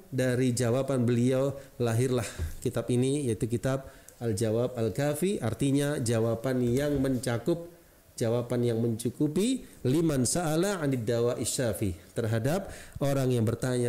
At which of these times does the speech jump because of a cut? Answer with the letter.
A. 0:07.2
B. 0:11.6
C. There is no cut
C